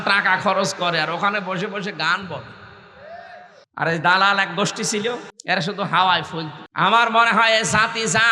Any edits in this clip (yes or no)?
yes